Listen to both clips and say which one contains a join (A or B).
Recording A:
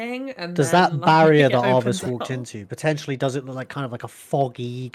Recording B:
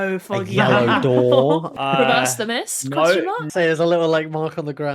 B